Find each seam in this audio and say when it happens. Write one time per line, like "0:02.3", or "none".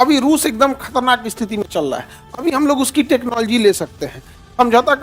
none